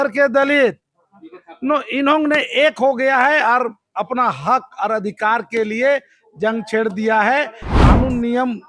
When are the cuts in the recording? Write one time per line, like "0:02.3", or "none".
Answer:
0:07.6